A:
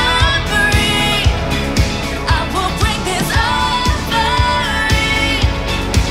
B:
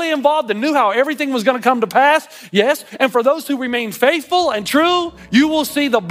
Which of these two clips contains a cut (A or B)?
B